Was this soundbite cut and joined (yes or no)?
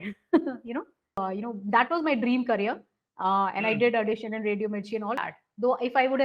yes